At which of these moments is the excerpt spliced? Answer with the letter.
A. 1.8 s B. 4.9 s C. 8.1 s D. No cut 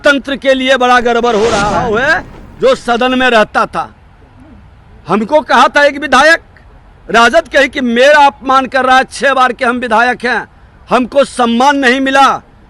A